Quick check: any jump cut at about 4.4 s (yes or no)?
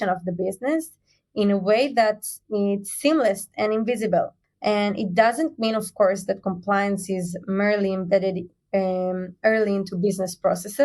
yes